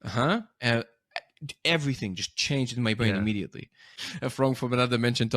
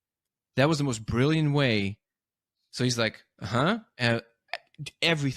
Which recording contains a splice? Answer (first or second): first